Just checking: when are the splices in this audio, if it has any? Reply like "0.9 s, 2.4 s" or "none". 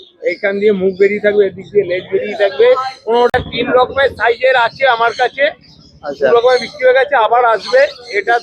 3.3 s